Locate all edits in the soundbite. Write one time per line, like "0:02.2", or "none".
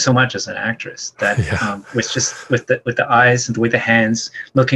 none